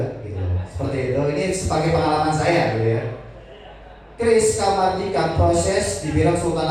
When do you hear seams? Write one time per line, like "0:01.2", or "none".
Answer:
none